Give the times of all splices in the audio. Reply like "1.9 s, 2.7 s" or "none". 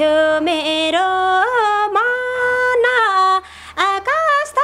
none